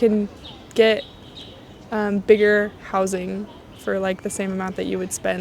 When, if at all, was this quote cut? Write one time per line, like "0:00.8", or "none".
none